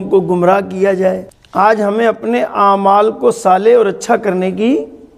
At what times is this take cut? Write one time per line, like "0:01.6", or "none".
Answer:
0:01.4